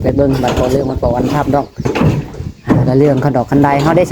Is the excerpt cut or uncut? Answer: cut